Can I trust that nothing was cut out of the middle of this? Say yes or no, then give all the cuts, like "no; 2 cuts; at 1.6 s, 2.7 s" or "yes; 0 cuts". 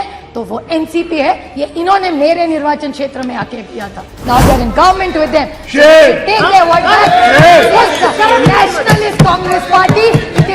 no; 1 cut; at 4.1 s